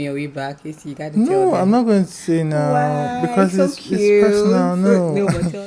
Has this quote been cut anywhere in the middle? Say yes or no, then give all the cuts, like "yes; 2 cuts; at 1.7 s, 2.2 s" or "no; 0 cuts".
no; 0 cuts